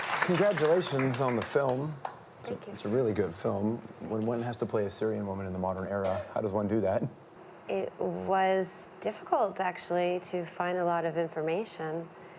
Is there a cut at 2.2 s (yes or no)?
yes